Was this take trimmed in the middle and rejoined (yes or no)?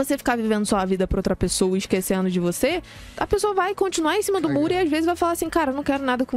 no